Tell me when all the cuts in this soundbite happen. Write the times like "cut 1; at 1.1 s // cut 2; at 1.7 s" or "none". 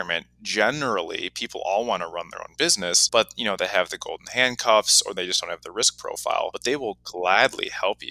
cut 1; at 3.0 s // cut 2; at 6.6 s